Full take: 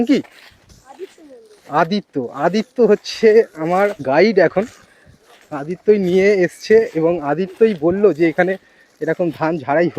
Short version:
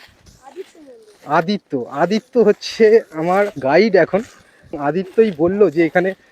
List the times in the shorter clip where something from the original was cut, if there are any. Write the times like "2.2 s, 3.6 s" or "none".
4.8 s

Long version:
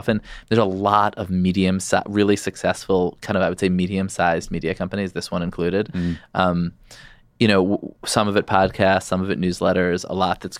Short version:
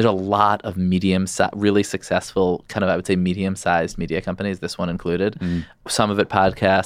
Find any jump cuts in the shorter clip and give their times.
5.7 s

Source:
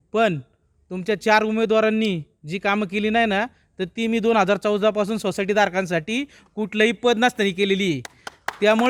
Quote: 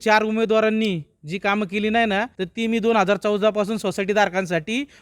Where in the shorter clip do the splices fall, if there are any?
2.4 s

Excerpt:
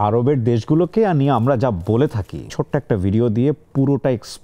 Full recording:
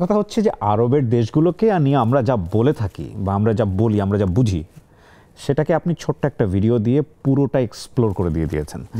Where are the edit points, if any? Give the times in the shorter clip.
2.5 s

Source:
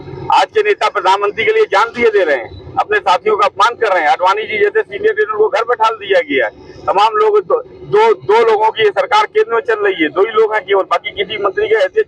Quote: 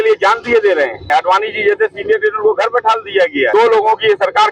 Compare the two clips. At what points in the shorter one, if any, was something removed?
1.1 s, 3.5 s

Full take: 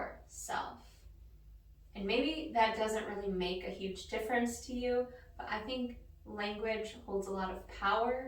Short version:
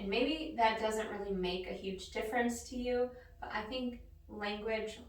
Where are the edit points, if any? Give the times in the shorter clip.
none

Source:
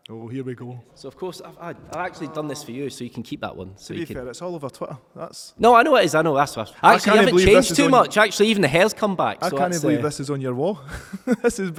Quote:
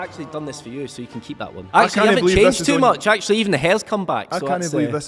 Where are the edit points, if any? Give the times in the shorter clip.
1.5 s

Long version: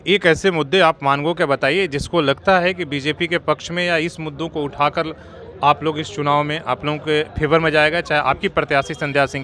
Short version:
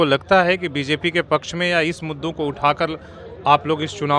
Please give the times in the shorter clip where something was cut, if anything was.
none

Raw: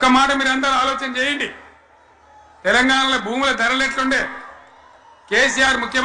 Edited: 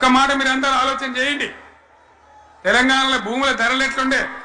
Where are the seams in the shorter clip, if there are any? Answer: none

